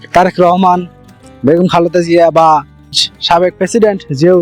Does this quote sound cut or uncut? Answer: cut